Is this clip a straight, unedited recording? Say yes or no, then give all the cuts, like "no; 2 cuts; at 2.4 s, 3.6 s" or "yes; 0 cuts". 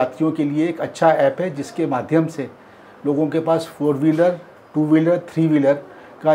yes; 0 cuts